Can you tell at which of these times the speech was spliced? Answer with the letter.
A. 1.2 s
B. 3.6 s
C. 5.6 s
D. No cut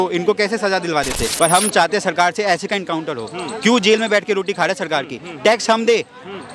A